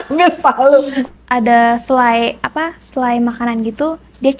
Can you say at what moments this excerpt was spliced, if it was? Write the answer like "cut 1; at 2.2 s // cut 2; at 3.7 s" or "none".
cut 1; at 1.0 s